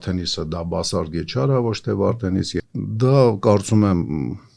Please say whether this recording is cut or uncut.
cut